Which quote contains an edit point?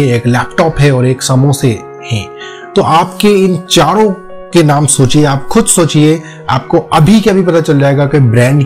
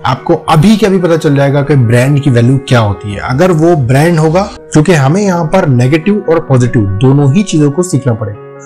second; 1 cut; at 4.6 s

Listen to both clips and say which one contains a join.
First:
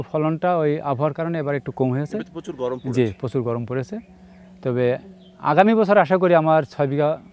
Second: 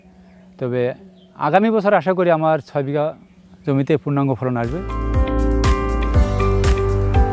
second; 1 cut; at 5.0 s

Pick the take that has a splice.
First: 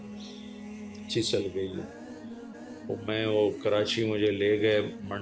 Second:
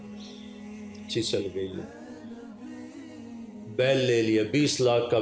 first; 1 cut; at 2.5 s

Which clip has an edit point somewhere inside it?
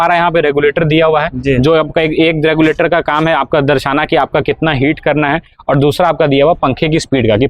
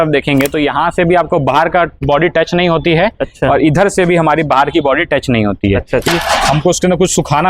second; 1 cut; at 6.1 s

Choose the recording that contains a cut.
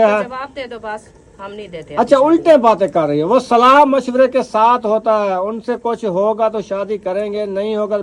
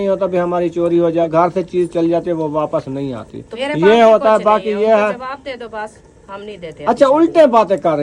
second; 1 cut; at 1.3 s

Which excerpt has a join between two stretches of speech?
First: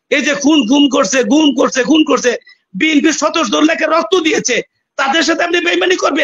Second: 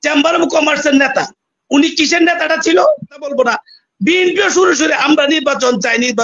second; 1 cut; at 3.3 s

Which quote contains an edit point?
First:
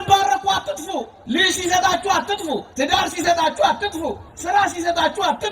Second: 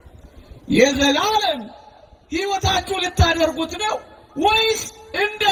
first; 3 cuts; at 1.1 s, 2.7 s, 4.3 s

